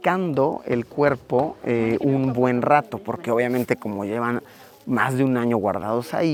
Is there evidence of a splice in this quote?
no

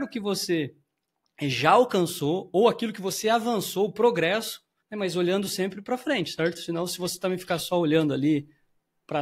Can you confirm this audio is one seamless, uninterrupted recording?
yes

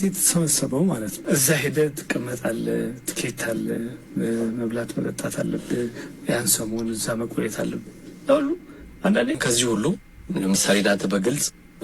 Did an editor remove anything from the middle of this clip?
yes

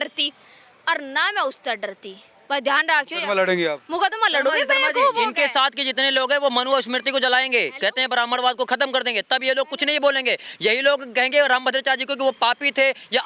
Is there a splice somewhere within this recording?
no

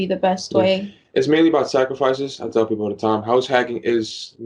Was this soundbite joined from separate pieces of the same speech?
no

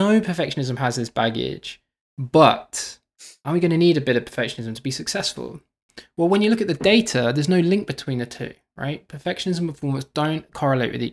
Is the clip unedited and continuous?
yes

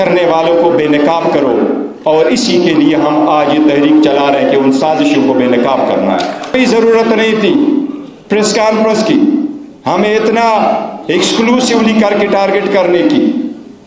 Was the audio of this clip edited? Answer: yes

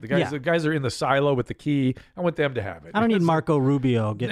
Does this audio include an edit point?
no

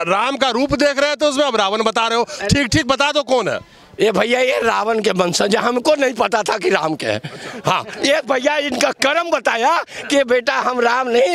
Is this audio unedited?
yes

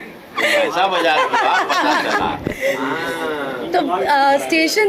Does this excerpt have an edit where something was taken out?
no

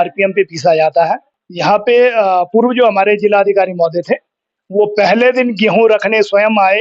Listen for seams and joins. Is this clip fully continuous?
no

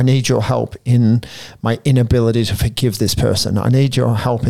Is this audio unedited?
yes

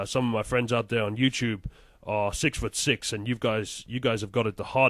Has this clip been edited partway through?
yes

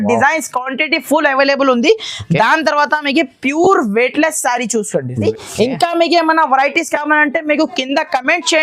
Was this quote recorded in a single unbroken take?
no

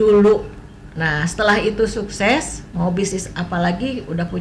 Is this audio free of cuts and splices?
yes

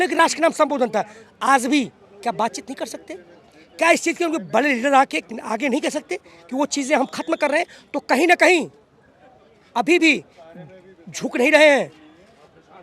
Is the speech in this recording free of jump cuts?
yes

